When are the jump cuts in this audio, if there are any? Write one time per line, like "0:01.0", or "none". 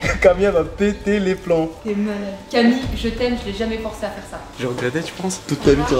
0:01.7
0:04.5